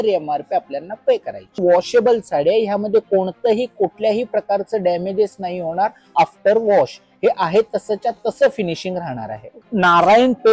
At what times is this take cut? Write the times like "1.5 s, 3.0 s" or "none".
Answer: 1.6 s, 9.6 s